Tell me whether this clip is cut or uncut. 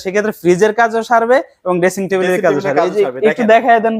uncut